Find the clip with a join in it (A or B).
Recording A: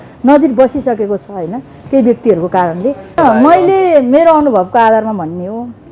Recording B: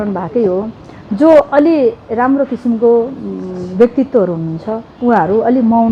A